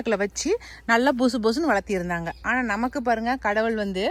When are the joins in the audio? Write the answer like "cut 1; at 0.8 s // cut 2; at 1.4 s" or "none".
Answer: none